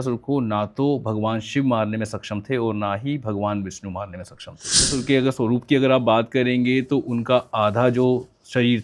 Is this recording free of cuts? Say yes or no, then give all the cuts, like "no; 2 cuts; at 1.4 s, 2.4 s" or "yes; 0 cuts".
no; 1 cut; at 4.9 s